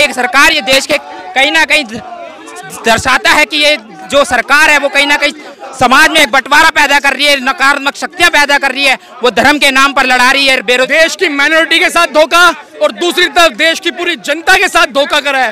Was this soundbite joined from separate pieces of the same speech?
yes; 1 cut; at 10.9 s

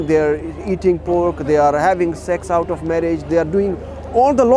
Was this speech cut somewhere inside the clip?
no; 0 cuts

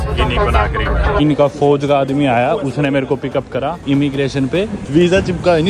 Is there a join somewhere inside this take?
yes; 3 cuts; at 1.2 s, 3.8 s, 4.8 s

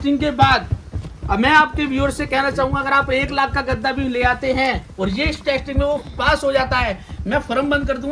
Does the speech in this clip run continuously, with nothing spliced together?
yes; 0 cuts

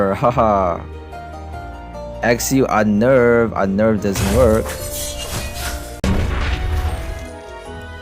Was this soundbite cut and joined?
yes; 1 cut; at 6.0 s

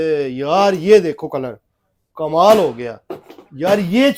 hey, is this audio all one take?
yes; 0 cuts

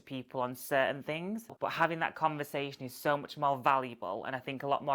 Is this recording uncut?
no; 1 cut; at 1.5 s

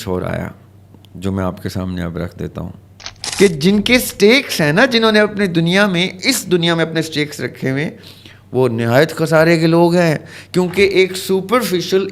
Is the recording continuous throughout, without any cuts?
no; 1 cut; at 3.2 s

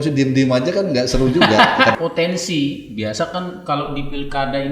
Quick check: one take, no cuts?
no; 1 cut; at 1.9 s

